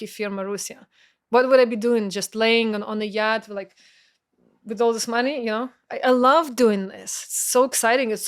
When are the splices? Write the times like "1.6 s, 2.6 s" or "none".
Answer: none